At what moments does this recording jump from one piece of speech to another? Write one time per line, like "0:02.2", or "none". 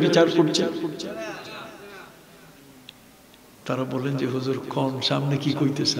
none